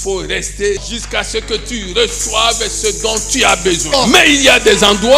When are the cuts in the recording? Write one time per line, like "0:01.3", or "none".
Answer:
0:00.9
0:03.9